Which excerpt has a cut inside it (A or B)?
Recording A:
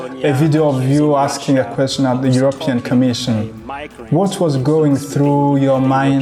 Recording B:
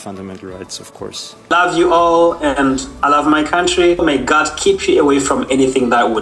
B